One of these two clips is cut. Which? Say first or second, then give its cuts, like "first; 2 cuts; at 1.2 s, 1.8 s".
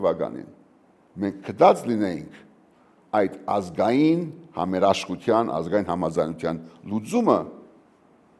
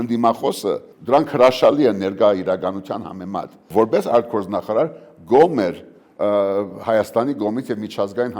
second; 2 cuts; at 0.9 s, 3.6 s